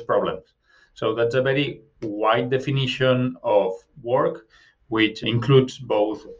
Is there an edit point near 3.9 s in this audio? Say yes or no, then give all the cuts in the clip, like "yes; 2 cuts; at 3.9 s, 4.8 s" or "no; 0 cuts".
no; 1 cut; at 5.2 s